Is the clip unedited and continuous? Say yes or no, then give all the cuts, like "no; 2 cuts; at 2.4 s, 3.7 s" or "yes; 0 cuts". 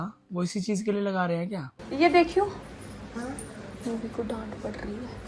yes; 0 cuts